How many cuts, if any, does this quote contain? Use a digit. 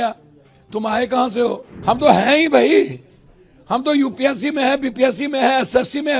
1